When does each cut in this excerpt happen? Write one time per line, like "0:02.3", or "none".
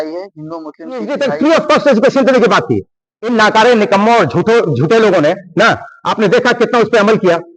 0:01.1